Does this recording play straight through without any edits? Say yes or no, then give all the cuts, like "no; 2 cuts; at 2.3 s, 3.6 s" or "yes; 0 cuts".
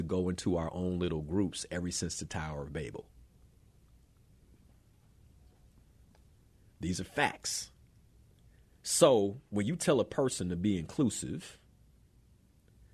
yes; 0 cuts